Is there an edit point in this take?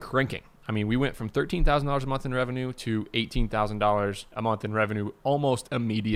no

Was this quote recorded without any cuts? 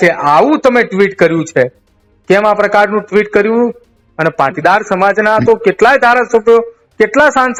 yes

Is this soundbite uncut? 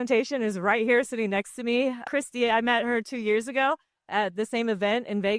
no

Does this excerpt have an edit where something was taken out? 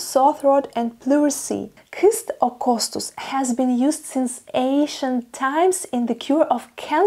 yes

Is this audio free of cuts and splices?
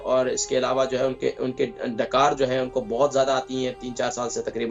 yes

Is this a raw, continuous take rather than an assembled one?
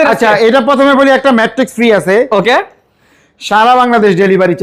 yes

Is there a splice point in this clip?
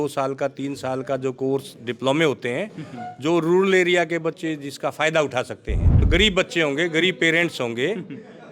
yes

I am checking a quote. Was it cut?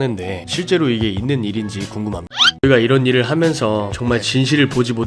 yes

